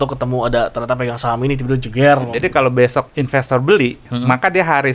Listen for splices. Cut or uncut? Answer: cut